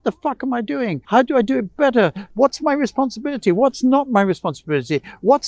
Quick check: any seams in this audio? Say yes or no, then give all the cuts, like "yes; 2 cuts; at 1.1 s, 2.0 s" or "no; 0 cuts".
yes; 2 cuts; at 1.0 s, 2.2 s